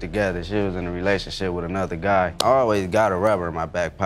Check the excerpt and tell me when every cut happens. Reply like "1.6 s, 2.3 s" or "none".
2.3 s